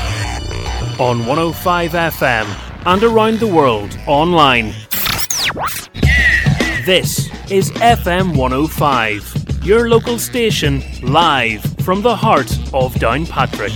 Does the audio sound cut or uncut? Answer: uncut